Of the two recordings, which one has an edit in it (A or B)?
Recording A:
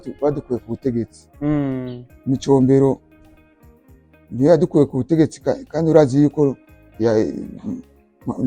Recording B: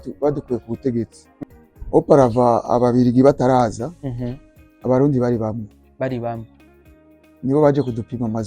B